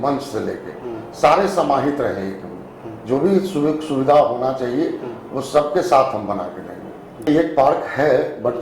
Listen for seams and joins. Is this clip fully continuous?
no; 1 cut; at 7.3 s

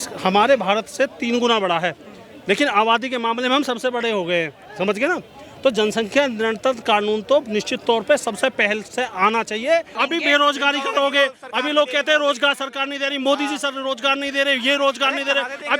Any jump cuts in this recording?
yes; 1 cut; at 9.9 s

